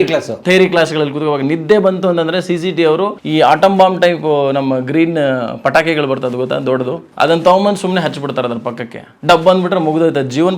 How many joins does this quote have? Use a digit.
2